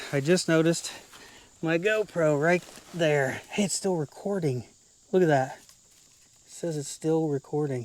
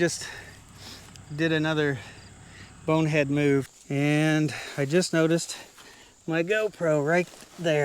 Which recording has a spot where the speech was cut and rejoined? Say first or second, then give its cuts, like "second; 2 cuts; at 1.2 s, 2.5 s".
second; 1 cut; at 3.7 s